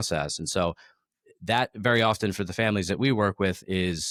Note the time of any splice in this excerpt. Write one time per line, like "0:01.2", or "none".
none